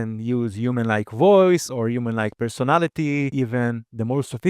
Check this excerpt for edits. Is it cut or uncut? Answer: cut